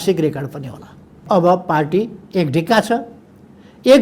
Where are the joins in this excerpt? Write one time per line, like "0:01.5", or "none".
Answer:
0:01.2